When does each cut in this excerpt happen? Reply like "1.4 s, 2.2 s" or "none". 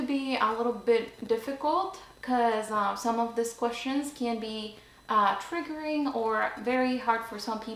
none